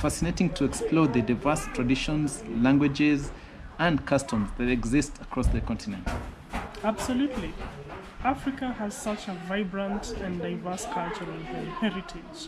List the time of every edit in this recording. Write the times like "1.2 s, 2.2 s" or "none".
6.7 s